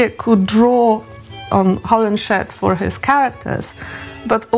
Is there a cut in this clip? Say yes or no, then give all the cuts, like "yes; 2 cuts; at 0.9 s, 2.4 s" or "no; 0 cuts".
yes; 1 cut; at 1.4 s